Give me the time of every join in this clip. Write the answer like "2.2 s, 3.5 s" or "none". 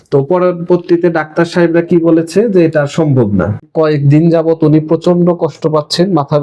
3.6 s